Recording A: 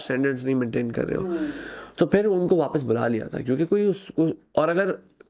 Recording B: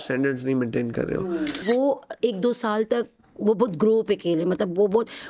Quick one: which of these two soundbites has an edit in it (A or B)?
B